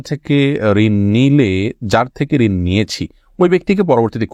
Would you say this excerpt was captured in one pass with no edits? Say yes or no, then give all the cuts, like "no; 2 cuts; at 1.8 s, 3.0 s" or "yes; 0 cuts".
yes; 0 cuts